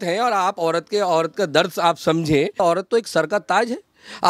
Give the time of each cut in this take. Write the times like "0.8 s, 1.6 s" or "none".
2.6 s